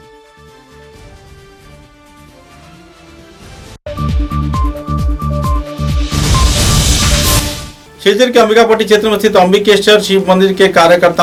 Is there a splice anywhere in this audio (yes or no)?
no